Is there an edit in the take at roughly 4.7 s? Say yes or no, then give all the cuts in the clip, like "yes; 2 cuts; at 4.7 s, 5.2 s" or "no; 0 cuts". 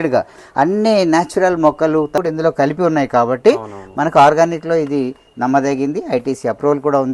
no; 1 cut; at 2.2 s